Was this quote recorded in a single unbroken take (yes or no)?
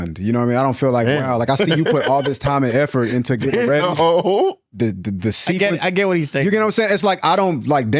yes